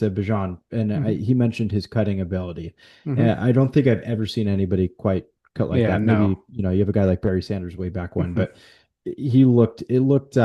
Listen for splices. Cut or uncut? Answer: uncut